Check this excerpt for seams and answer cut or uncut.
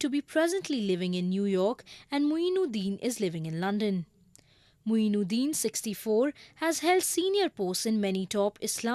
cut